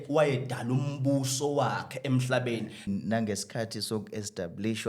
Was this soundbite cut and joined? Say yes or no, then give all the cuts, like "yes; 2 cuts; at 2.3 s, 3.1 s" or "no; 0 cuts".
yes; 1 cut; at 2.9 s